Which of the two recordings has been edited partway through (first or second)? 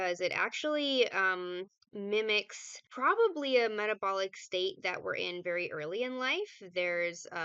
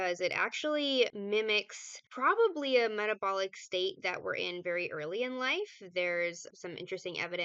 second